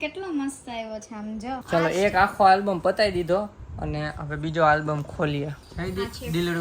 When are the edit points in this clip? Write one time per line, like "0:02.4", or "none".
0:01.6
0:05.6